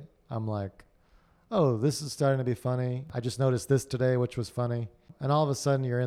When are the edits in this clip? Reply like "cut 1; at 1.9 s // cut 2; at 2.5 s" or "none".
cut 1; at 3.1 s // cut 2; at 5.1 s